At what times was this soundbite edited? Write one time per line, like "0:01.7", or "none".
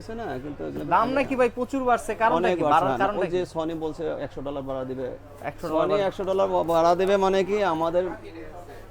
none